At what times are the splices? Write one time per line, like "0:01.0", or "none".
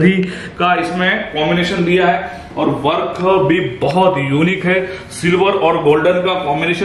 none